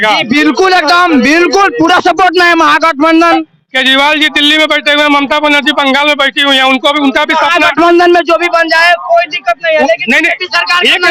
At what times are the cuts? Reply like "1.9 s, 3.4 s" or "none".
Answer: none